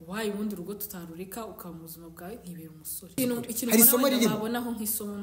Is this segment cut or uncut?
cut